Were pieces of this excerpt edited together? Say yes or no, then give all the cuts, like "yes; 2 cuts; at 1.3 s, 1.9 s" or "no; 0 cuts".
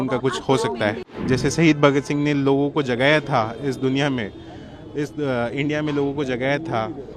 yes; 1 cut; at 1.0 s